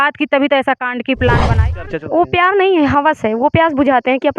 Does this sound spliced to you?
yes; 1 cut; at 1.8 s

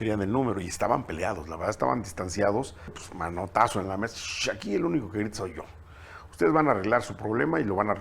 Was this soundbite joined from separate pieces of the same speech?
yes; 1 cut; at 3.1 s

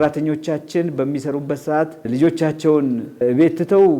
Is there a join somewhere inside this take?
yes; 2 cuts; at 2.1 s, 3.2 s

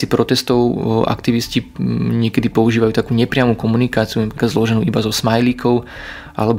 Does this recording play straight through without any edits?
no; 1 cut; at 4.3 s

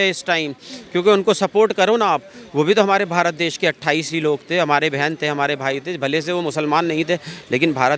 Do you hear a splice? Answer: no; 0 cuts

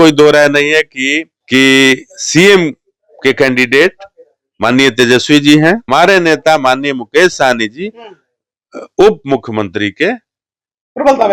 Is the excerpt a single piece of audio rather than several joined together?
no; 2 cuts; at 1.3 s, 5.8 s

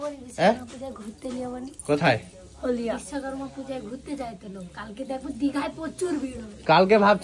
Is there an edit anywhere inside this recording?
no; 0 cuts

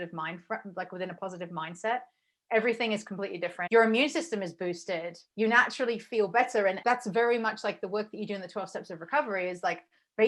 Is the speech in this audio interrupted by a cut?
yes; 3 cuts; at 3.6 s, 5.2 s, 6.8 s

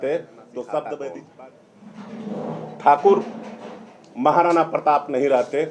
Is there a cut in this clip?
yes; 1 cut; at 1.2 s

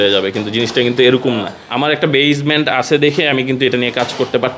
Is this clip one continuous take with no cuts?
no; 1 cut; at 2.0 s

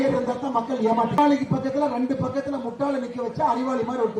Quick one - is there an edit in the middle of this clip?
yes; 1 cut; at 1.2 s

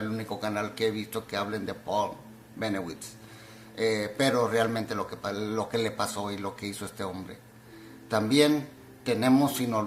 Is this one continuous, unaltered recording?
no; 1 cut; at 7.2 s

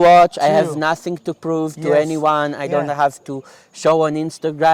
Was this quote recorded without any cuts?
yes; 0 cuts

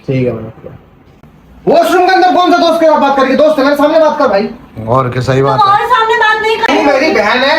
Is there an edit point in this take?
yes; 2 cuts; at 1.1 s, 6.7 s

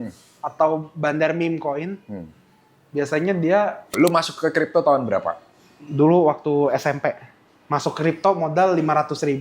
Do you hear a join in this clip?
yes; 1 cut; at 3.9 s

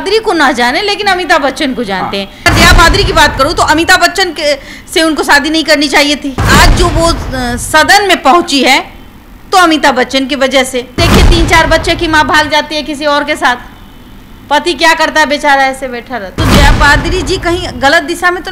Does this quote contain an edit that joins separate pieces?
yes; 4 cuts; at 2.4 s, 6.5 s, 11.0 s, 16.3 s

